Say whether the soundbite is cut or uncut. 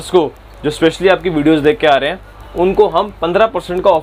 uncut